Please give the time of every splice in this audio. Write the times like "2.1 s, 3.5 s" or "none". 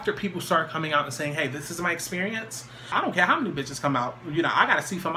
2.9 s